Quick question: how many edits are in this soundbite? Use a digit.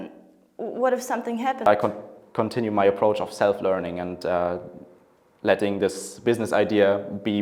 1